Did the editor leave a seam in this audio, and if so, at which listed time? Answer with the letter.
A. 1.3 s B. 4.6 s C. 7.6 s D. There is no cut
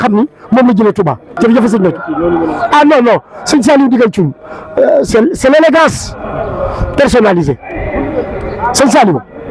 A